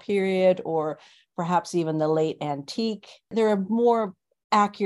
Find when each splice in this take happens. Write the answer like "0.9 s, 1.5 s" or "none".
3.3 s